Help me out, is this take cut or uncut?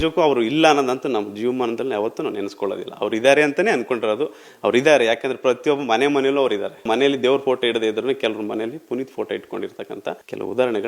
uncut